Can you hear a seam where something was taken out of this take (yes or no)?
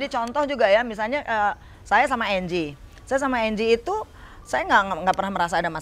no